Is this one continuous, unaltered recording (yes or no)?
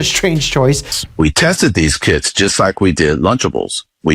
no